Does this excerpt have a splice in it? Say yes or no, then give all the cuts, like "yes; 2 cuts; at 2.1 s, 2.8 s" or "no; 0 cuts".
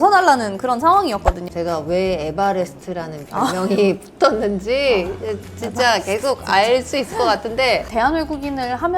yes; 2 cuts; at 1.4 s, 7.8 s